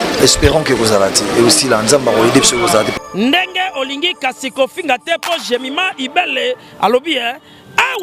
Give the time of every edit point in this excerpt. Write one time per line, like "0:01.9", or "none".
none